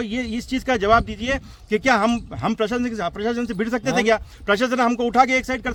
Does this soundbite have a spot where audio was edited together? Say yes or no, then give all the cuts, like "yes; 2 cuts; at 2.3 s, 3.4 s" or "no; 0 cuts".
no; 0 cuts